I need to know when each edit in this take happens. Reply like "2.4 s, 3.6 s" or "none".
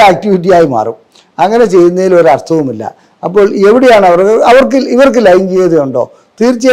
none

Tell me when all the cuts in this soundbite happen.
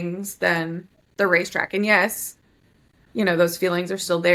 none

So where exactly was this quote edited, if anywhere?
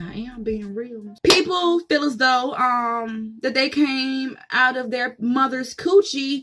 1.1 s

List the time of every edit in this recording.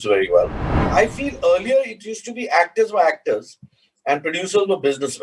0.9 s

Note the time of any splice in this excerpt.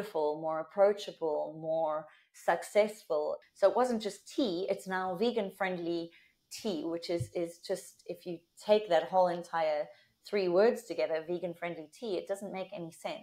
3.4 s

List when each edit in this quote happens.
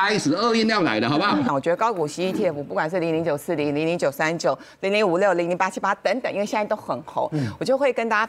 1.5 s

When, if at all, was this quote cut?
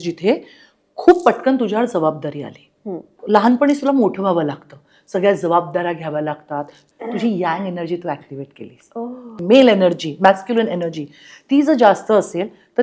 3.2 s, 6.8 s, 9.4 s

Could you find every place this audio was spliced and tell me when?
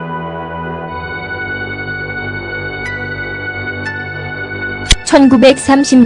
3.8 s

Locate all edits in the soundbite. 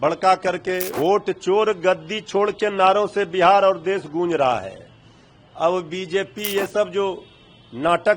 0.9 s

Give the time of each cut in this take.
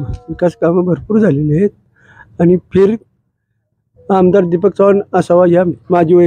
none

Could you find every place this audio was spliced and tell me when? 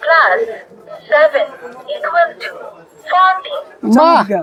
none

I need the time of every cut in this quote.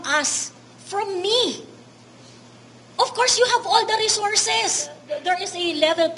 5.1 s

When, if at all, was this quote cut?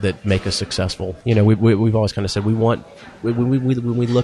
none

